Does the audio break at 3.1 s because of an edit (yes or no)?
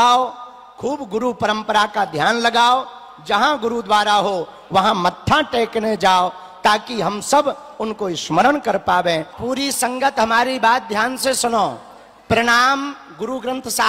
no